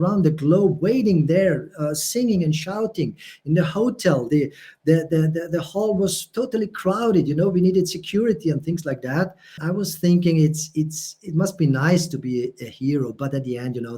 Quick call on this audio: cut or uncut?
cut